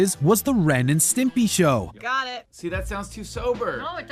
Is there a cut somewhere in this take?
no; 0 cuts

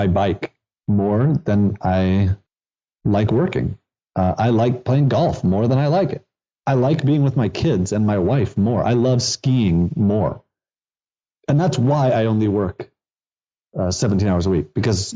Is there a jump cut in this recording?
yes; 1 cut; at 3.0 s

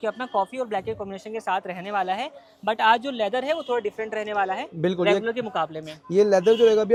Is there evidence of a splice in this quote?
no; 0 cuts

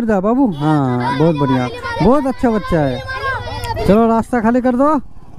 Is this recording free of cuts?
no; 1 cut; at 3.8 s

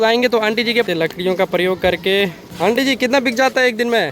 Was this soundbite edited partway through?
yes; 2 cuts; at 0.8 s, 2.4 s

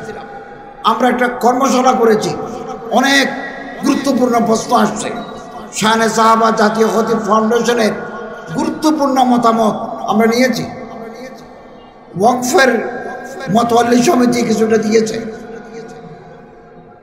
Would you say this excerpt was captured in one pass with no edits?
yes; 0 cuts

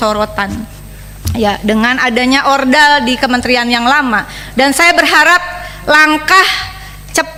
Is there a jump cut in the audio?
no; 0 cuts

